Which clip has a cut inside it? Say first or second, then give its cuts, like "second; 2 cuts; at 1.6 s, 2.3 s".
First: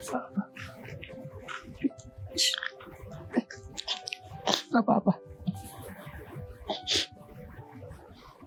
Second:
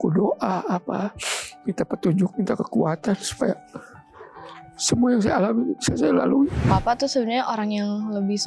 second; 1 cut; at 6.6 s